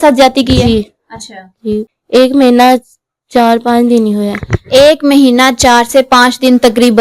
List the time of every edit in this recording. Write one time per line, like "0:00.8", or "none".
0:01.9